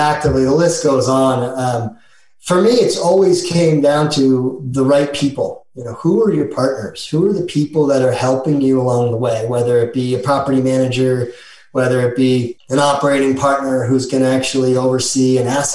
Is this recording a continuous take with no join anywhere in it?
no; 1 cut; at 12.6 s

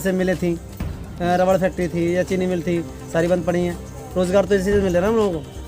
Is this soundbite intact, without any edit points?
yes; 0 cuts

